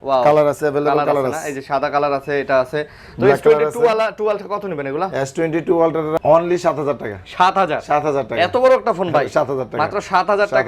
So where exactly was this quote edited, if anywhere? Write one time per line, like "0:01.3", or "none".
0:06.2